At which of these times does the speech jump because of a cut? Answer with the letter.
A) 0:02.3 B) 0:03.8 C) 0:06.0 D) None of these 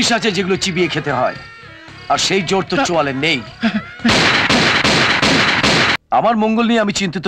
C